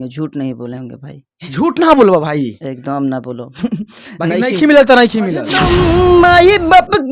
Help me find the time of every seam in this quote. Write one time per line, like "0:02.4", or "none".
0:05.6